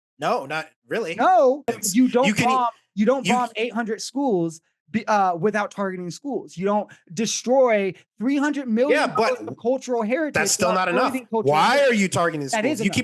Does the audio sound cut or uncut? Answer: cut